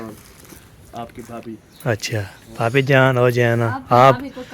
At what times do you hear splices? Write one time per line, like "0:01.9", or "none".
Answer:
none